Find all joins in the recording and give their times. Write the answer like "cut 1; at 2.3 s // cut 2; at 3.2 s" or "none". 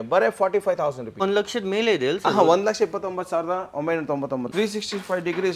cut 1; at 1.2 s // cut 2; at 4.5 s